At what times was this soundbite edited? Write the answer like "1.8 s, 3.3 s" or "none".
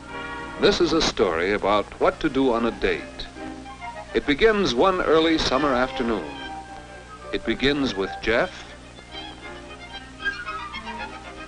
2.4 s